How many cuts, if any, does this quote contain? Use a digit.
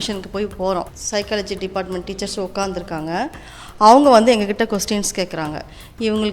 1